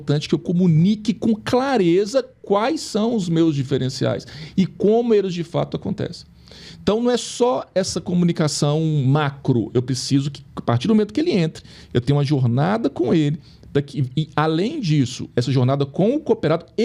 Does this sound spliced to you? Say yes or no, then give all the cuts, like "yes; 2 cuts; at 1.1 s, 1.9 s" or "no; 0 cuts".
no; 0 cuts